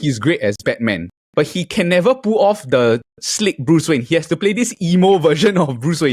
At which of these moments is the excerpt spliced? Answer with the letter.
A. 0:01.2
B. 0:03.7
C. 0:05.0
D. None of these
A